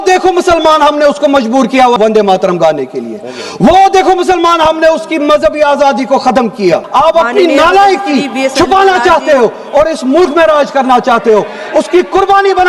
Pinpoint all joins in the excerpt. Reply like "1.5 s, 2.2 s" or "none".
2.0 s, 6.9 s